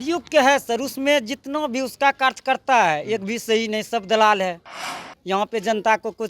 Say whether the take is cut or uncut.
uncut